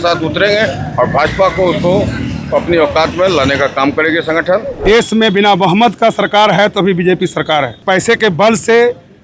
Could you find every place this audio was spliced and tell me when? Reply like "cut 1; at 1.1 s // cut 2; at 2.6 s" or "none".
cut 1; at 4.8 s // cut 2; at 7.8 s